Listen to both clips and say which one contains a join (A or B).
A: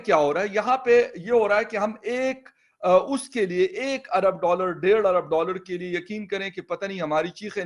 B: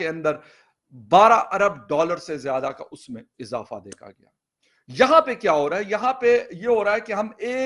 B